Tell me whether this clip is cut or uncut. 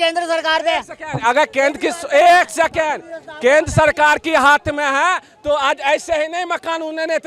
uncut